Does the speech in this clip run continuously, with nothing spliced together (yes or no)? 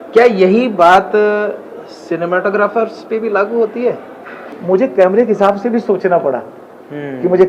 no